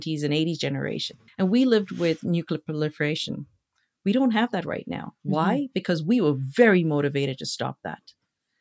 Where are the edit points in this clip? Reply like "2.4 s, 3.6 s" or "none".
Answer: 1.0 s

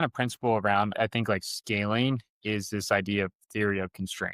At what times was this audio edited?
0.9 s

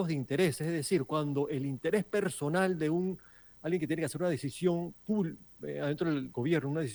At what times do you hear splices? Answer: none

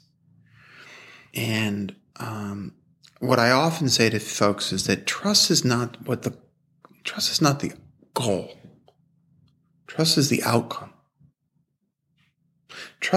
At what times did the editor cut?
1.2 s

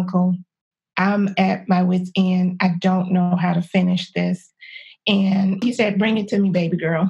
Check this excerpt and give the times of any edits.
none

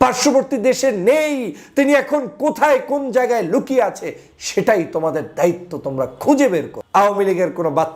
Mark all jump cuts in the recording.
6.8 s

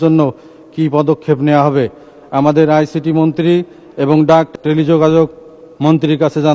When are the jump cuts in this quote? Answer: 4.5 s

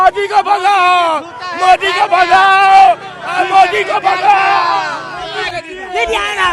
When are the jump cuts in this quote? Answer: 5.5 s

